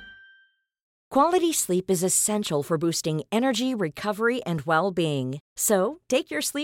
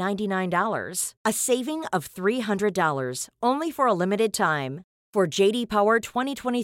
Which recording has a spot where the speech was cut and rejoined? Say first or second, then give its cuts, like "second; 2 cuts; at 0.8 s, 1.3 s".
first; 1 cut; at 0.9 s